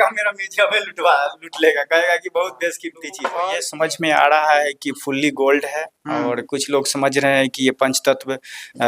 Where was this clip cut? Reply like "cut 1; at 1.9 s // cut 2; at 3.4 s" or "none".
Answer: cut 1; at 3.4 s